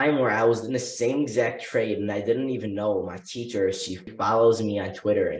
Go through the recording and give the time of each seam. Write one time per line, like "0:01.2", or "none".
0:04.0